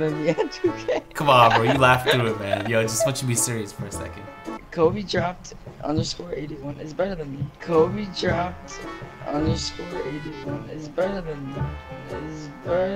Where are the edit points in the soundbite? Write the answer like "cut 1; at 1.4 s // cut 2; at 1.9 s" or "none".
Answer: none

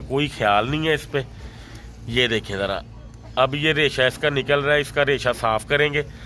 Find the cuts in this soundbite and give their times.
none

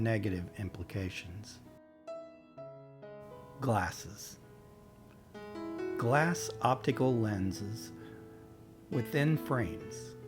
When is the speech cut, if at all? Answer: cut 1; at 4.0 s // cut 2; at 6.0 s

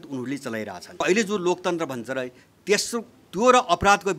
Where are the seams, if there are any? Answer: cut 1; at 1.0 s

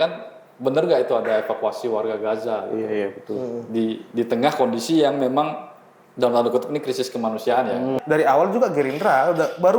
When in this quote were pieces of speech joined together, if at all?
cut 1; at 8.0 s

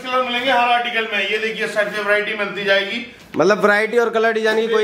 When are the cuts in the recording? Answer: none

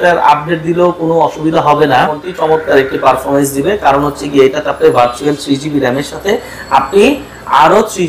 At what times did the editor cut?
cut 1; at 2.1 s

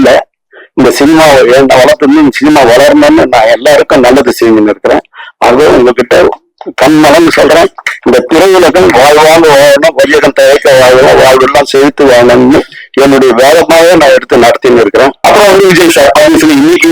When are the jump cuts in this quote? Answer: cut 1; at 15.2 s

